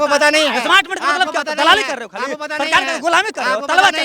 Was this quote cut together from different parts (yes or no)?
no